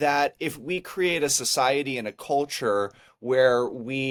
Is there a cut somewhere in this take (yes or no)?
no